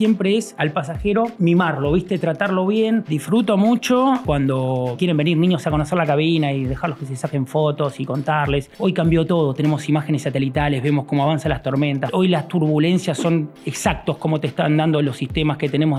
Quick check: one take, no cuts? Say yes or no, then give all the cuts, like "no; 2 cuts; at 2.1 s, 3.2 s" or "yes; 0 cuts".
no; 4 cuts; at 3.1 s, 4.8 s, 8.7 s, 12.1 s